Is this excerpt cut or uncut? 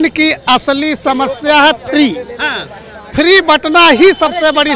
uncut